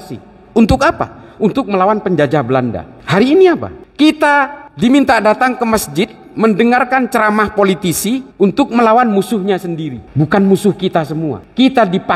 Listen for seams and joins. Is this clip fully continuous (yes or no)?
no